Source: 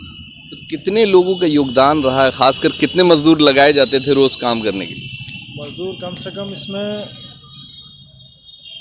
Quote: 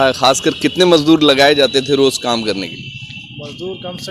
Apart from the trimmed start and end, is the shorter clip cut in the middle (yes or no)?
no